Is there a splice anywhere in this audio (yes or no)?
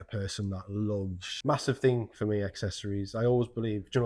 yes